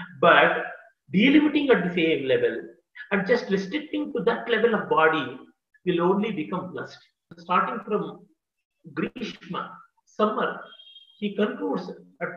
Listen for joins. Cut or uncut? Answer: cut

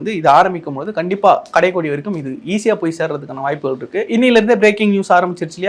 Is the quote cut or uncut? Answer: uncut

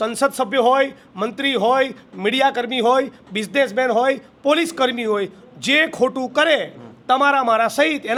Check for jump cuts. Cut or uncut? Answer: uncut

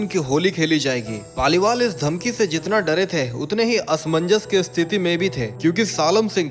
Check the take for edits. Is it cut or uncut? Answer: uncut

